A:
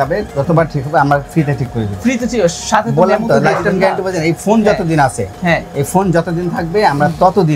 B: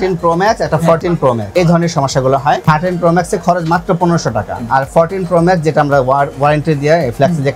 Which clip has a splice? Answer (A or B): B